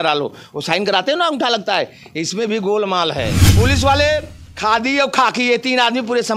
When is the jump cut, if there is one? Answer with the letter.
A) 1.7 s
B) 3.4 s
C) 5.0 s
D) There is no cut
B